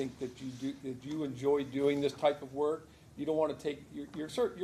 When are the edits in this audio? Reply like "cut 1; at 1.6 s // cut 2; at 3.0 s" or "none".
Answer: none